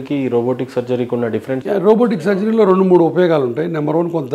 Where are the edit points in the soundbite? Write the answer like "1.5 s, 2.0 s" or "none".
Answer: none